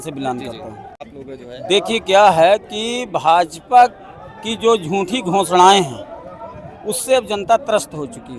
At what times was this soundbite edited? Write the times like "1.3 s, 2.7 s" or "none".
1.1 s